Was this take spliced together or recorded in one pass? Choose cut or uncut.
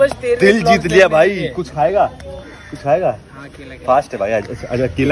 uncut